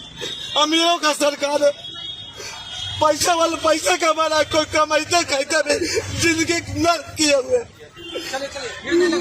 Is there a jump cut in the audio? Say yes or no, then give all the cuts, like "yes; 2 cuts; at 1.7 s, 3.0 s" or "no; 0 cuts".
no; 0 cuts